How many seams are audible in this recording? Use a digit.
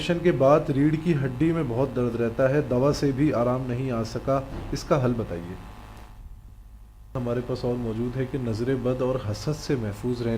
1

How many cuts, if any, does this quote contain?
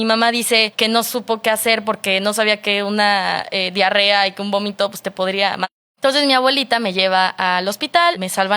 1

